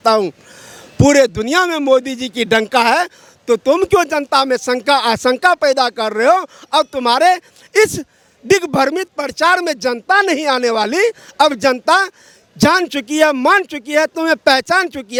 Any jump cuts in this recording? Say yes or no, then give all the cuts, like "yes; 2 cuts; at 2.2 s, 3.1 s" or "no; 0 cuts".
no; 0 cuts